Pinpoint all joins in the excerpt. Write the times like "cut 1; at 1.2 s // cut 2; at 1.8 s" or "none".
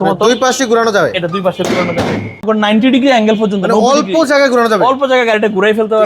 cut 1; at 2.4 s